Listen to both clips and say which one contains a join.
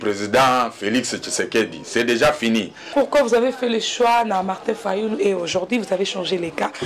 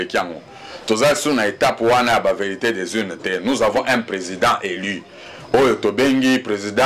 first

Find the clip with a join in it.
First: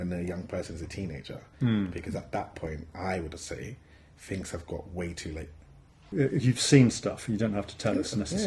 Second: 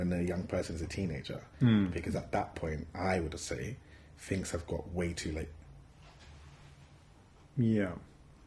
first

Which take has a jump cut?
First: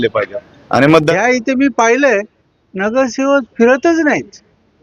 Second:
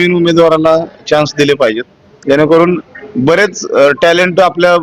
first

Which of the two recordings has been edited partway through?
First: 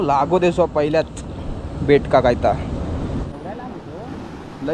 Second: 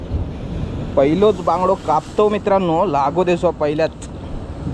first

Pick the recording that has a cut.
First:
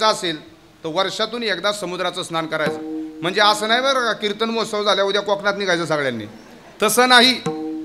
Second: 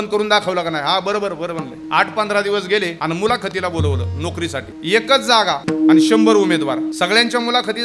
second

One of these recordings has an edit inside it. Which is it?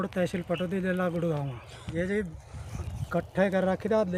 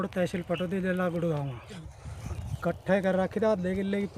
second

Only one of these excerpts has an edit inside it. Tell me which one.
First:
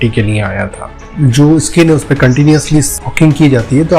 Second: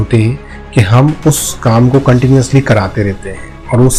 first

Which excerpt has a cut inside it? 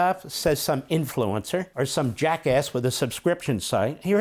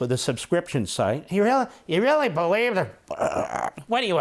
first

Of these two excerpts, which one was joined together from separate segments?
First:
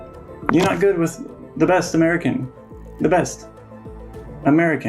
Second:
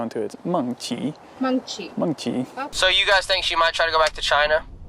second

